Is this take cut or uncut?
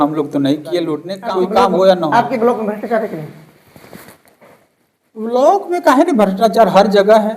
cut